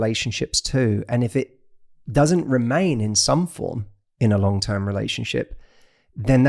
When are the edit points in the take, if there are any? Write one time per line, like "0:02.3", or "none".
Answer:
none